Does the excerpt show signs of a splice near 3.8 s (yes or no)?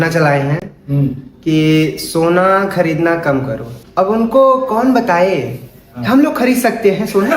yes